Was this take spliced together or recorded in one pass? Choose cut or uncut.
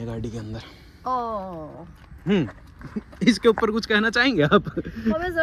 uncut